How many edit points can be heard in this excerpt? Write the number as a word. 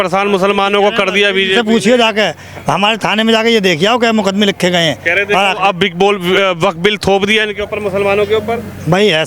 zero